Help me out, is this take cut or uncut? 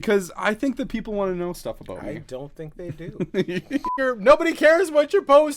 cut